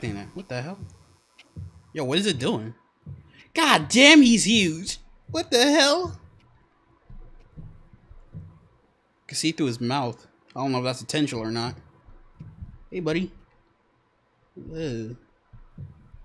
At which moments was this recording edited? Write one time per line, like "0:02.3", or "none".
none